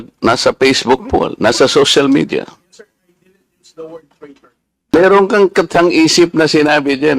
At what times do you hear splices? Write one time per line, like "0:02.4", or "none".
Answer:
0:04.8